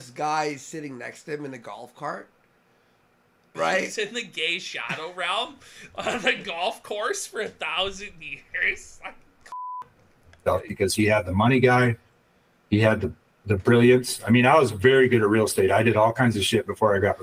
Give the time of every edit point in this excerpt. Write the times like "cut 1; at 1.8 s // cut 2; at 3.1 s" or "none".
none